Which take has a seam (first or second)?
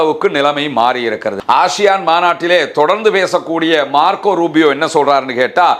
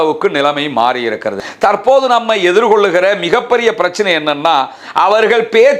second